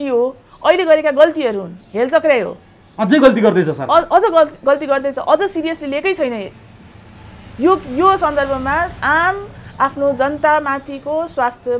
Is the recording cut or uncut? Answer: uncut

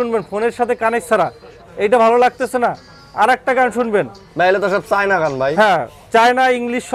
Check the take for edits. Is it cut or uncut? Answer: uncut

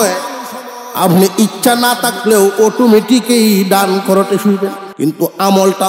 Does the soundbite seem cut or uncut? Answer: cut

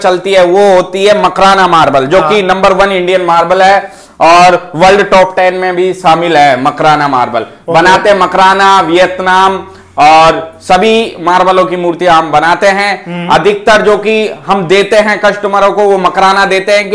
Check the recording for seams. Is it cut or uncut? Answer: uncut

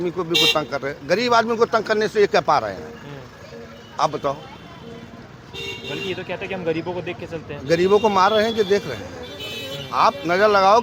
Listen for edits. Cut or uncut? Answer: uncut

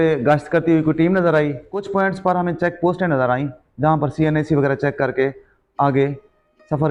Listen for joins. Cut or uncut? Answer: uncut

